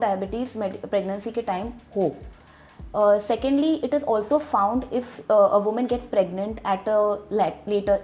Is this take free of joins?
yes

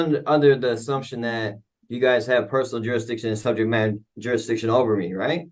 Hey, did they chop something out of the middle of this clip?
no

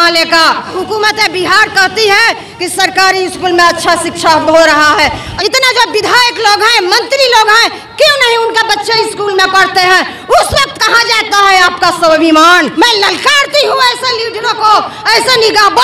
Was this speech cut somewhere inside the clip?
yes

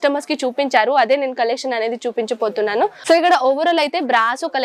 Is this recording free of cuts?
no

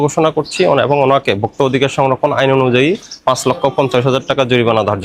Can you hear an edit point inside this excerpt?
no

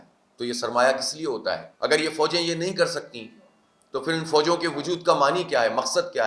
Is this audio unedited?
no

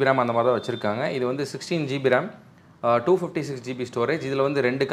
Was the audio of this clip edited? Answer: no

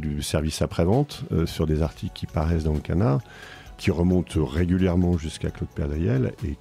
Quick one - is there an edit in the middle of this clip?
no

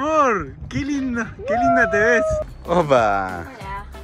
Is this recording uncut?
no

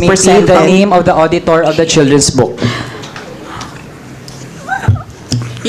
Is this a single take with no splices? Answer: yes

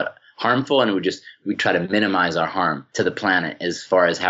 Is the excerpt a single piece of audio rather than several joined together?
no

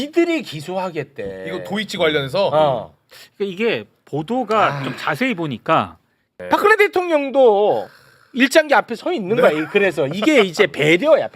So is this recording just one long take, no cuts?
no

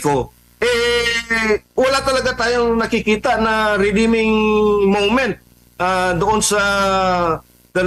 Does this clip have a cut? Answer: no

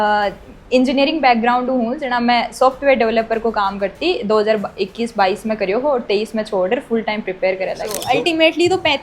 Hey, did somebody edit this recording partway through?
yes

